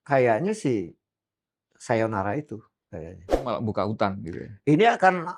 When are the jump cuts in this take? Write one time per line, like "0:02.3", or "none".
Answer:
0:03.4